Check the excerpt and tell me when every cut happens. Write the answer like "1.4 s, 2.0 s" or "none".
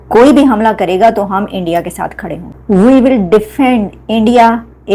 none